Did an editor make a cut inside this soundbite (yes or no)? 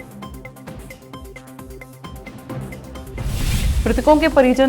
yes